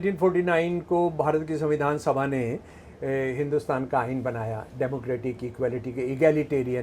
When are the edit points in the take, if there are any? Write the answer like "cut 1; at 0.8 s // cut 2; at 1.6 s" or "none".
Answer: none